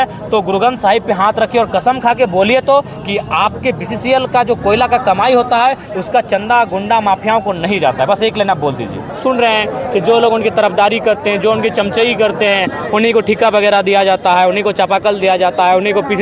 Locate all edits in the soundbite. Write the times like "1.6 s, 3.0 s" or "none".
9.1 s